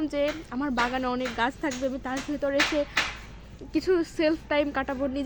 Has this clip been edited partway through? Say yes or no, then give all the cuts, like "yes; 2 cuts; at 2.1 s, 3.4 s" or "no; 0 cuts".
no; 0 cuts